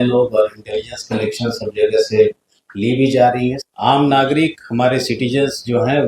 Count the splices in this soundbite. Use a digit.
1